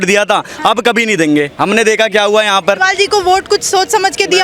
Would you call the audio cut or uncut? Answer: uncut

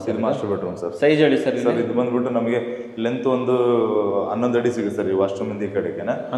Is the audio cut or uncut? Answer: uncut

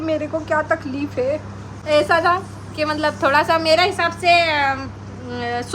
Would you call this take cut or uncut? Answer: cut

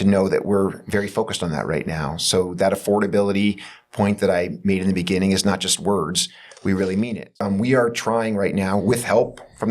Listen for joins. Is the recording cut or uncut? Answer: cut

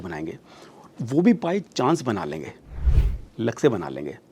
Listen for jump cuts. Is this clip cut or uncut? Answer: uncut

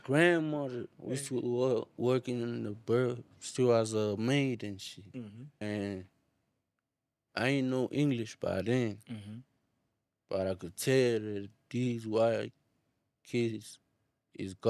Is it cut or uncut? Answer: cut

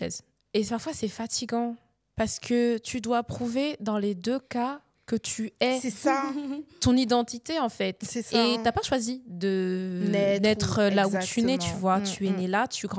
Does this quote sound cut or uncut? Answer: uncut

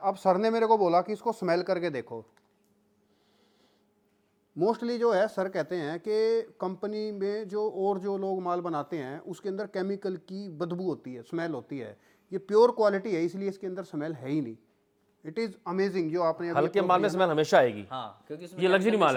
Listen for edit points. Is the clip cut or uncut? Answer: uncut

